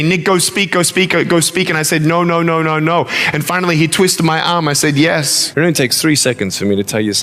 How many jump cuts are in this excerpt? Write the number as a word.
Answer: one